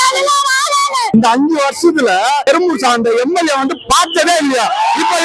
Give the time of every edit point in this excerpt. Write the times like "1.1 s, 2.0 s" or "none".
1.1 s